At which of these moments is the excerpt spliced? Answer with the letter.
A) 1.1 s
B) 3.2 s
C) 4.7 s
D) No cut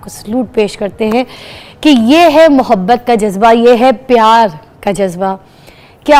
D